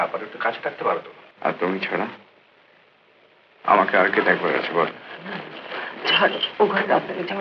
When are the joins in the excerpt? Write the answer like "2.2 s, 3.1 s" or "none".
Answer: 1.2 s